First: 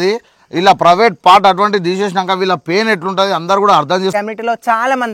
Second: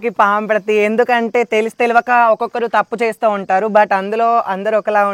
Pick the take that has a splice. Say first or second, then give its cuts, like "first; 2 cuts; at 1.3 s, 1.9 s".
first; 1 cut; at 4.1 s